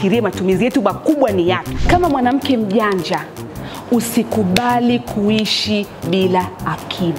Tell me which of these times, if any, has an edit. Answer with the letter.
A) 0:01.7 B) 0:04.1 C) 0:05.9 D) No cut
A